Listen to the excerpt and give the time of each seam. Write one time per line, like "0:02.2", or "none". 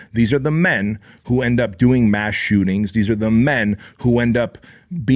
none

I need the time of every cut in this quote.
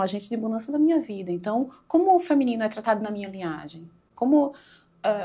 none

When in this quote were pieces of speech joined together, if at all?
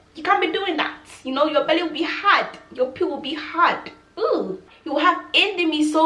0:04.7

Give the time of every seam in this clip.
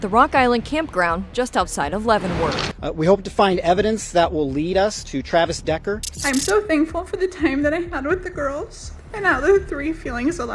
0:02.7
0:06.1

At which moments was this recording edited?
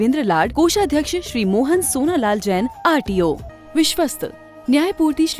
0:03.5

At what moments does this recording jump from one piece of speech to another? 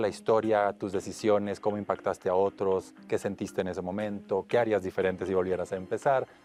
none

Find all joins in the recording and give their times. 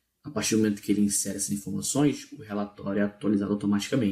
0:03.1

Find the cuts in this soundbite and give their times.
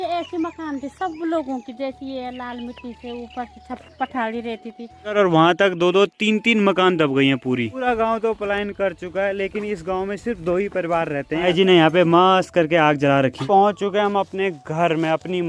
0:05.1
0:07.8
0:11.4
0:13.4

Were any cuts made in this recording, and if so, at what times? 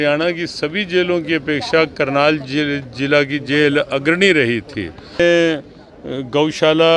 0:05.2

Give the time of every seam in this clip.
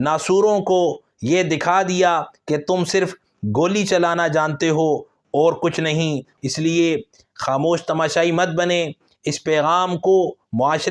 0:06.3

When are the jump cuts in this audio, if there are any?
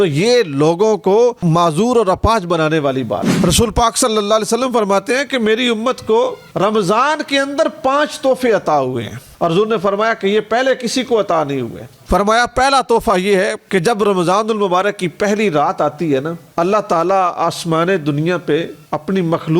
0:03.3
0:09.2
0:12.0
0:16.4

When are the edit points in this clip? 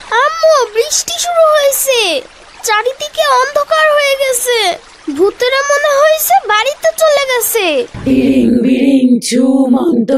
0:07.9

